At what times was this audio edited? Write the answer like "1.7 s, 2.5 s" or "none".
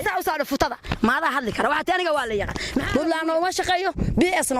2.9 s